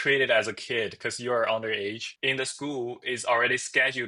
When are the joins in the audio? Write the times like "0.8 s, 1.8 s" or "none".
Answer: 2.1 s